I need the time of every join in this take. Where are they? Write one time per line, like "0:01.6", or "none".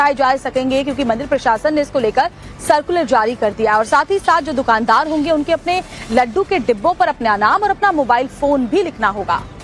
0:03.2